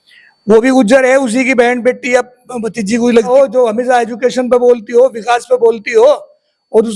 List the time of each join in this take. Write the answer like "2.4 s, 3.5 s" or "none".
3.3 s